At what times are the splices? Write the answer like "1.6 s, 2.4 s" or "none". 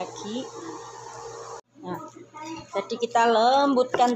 1.7 s